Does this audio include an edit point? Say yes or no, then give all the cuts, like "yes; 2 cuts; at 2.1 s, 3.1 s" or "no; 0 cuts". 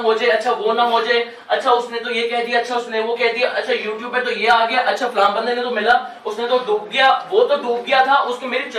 no; 0 cuts